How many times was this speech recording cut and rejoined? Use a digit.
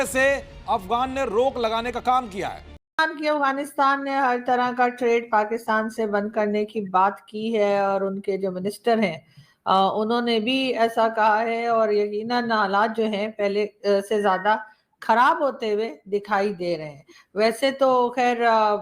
1